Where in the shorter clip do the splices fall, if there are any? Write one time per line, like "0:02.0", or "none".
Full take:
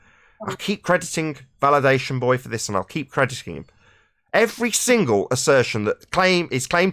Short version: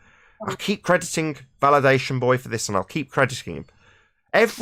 none